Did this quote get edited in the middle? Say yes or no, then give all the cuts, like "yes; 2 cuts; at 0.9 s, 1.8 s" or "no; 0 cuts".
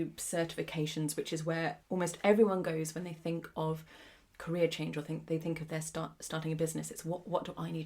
yes; 1 cut; at 1.8 s